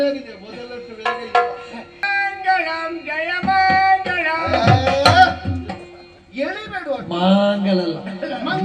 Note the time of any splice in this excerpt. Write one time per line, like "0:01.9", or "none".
0:02.0